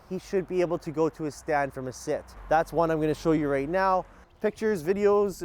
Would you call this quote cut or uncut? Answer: cut